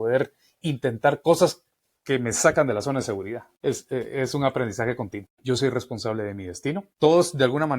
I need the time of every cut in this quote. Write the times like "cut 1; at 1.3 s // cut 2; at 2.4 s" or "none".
cut 1; at 3.5 s // cut 2; at 5.3 s // cut 3; at 6.9 s